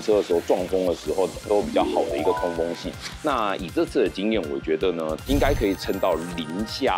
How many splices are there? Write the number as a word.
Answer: two